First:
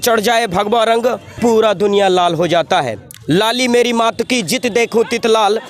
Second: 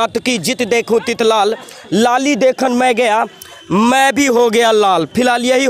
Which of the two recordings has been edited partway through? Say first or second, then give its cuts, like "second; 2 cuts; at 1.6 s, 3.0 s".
first; 1 cut; at 1.3 s